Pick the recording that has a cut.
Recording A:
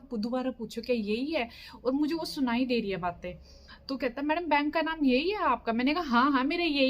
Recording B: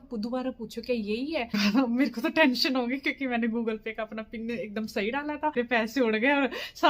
B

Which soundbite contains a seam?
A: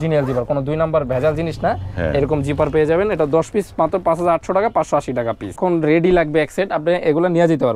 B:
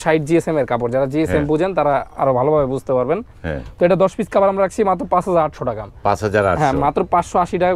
A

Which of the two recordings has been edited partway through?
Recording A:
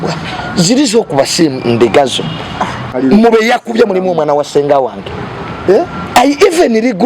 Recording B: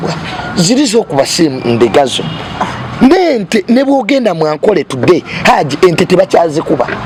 A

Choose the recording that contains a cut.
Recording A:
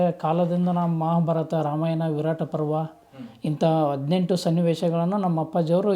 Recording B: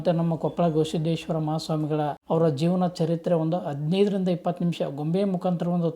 B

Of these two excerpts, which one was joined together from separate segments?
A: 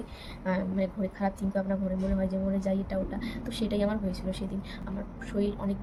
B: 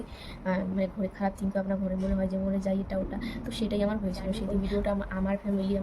B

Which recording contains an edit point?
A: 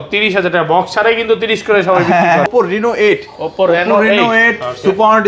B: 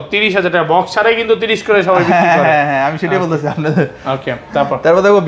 A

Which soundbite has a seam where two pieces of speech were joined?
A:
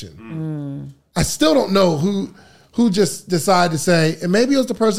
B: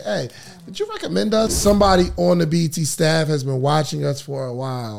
B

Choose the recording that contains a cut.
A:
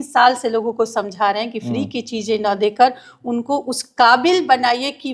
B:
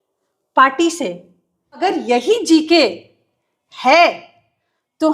B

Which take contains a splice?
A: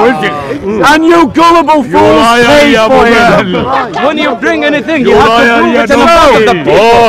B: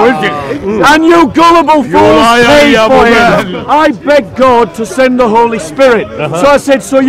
B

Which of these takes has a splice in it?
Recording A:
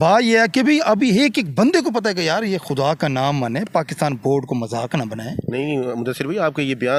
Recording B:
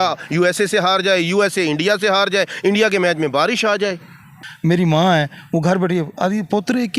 B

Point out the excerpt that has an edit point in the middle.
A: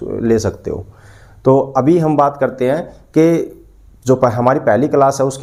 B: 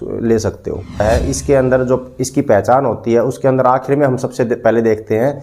B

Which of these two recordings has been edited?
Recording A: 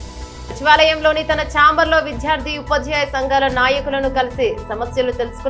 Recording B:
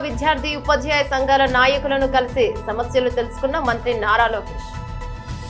B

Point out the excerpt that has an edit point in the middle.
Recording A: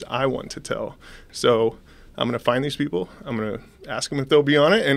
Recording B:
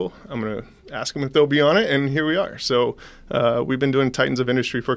A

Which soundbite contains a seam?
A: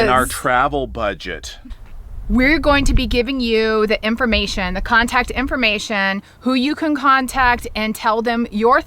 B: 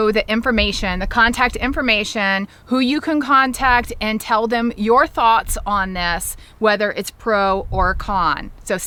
A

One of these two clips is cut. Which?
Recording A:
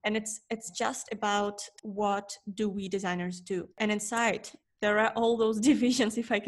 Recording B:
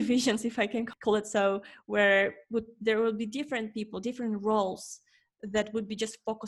A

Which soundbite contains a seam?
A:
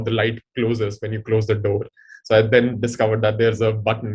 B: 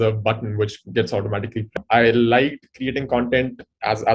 B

